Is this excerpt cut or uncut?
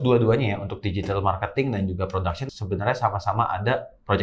uncut